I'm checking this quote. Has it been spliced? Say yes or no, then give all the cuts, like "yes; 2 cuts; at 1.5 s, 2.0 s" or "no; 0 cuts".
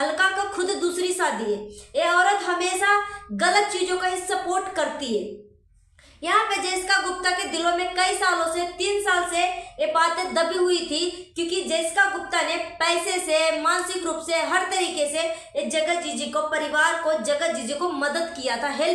no; 0 cuts